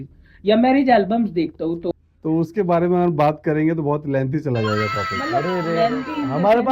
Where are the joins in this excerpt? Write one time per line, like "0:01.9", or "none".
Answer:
0:01.8

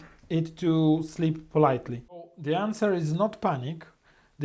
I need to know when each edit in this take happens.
0:02.3

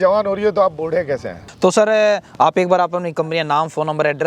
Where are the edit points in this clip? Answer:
none

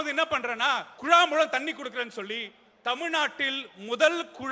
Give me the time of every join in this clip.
0:00.9

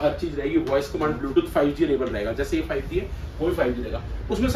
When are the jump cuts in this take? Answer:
none

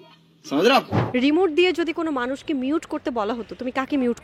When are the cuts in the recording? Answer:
0:01.0

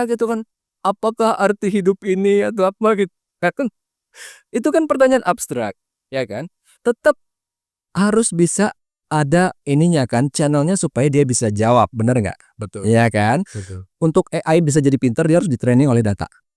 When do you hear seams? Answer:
0:13.8

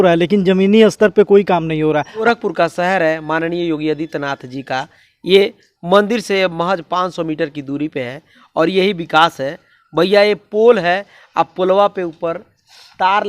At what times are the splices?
0:02.2

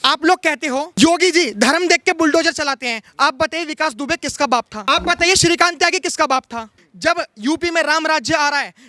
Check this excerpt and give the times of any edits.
0:00.9
0:04.7
0:06.8

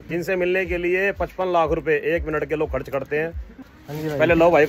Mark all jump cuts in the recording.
0:03.8

